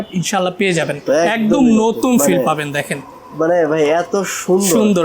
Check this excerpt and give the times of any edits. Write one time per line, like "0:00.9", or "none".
0:01.0